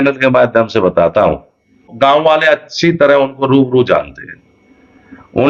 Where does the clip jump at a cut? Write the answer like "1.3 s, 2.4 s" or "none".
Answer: 1.9 s